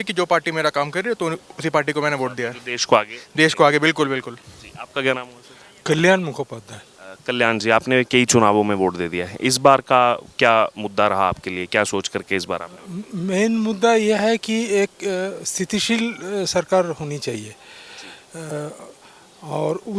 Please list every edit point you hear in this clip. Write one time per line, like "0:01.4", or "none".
none